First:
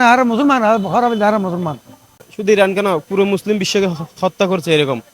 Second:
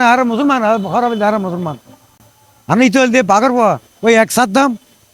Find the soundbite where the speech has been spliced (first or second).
first